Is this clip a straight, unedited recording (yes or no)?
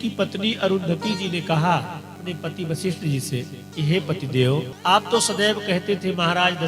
no